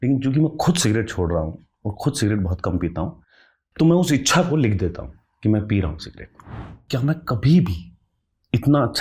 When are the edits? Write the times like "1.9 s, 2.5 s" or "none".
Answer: 6.7 s